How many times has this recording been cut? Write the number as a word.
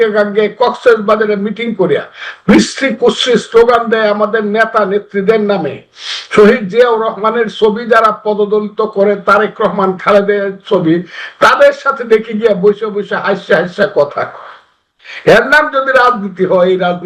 zero